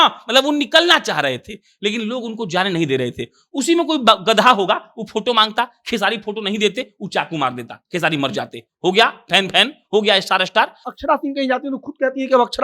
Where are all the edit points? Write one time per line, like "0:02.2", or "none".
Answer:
0:10.9